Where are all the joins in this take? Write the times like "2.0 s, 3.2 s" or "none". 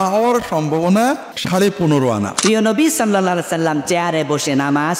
1.3 s, 2.3 s